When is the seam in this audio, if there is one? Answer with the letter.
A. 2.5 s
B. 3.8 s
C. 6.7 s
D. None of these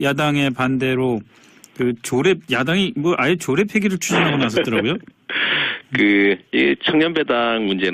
C